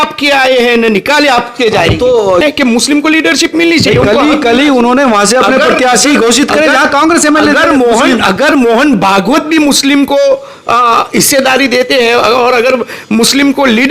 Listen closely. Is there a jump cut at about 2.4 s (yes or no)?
yes